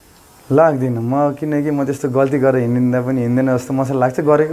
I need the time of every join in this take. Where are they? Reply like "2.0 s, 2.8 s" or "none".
none